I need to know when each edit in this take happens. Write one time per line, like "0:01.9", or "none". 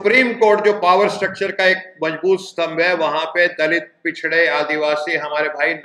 none